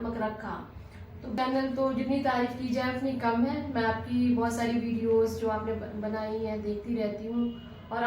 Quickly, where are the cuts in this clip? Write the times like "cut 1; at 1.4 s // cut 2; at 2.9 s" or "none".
cut 1; at 1.4 s